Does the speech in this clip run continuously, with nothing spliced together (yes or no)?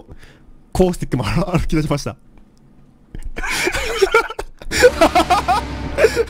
yes